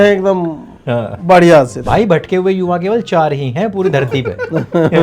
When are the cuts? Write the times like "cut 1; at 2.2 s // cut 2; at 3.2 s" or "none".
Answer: cut 1; at 1.8 s